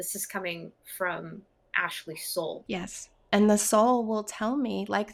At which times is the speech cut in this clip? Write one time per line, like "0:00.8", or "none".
0:02.6